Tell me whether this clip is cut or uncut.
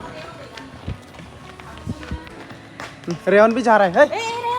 uncut